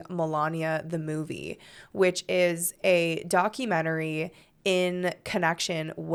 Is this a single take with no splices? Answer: yes; 0 cuts

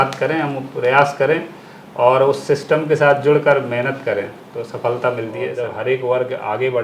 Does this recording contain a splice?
yes; 1 cut; at 5.5 s

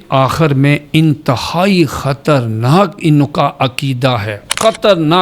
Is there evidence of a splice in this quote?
no; 0 cuts

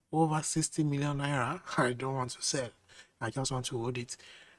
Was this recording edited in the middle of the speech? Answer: no; 0 cuts

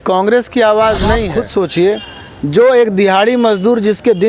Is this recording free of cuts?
no; 1 cut; at 1.4 s

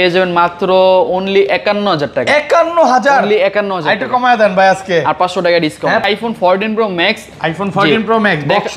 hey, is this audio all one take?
no; 1 cut; at 6.1 s

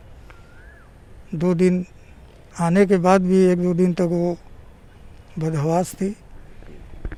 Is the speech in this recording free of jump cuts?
yes; 0 cuts

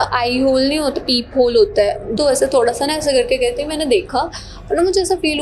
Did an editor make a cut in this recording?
yes; 1 cut; at 2.1 s

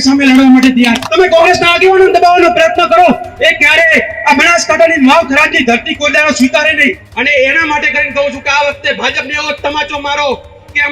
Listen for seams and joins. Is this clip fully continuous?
no; 2 cuts; at 1.0 s, 7.1 s

